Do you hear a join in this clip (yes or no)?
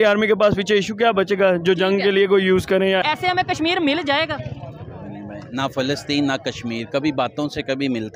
yes